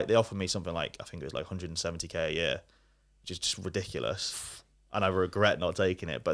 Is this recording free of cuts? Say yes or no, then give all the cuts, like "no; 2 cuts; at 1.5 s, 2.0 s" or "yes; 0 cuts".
yes; 0 cuts